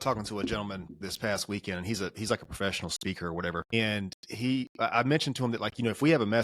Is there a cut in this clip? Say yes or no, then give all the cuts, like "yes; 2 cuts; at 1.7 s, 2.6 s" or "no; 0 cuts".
yes; 2 cuts; at 1.0 s, 3.7 s